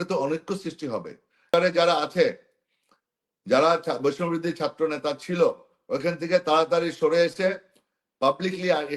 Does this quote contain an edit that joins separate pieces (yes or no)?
yes